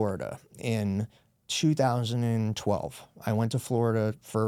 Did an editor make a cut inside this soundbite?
no; 0 cuts

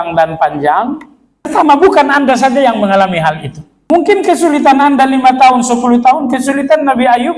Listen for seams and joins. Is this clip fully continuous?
no; 2 cuts; at 1.5 s, 3.9 s

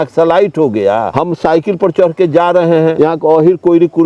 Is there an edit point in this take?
yes; 2 cuts; at 1.1 s, 2.9 s

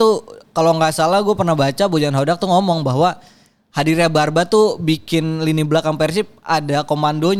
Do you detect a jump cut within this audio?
no; 0 cuts

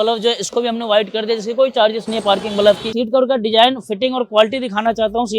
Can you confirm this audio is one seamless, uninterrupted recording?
no; 1 cut; at 2.9 s

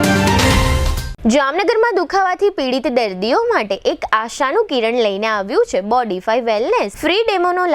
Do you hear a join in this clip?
yes; 1 cut; at 1.0 s

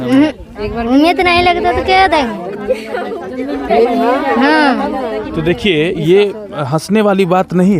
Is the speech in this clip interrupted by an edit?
no; 0 cuts

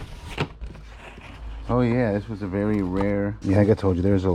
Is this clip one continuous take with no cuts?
no; 1 cut; at 3.4 s

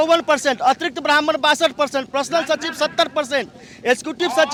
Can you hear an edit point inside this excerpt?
no; 0 cuts

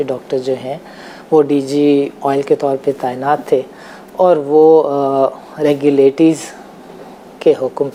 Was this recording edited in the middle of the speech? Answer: no; 0 cuts

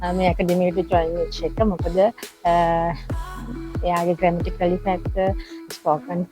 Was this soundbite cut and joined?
no; 0 cuts

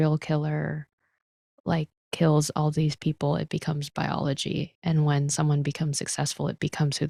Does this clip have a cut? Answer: no; 0 cuts

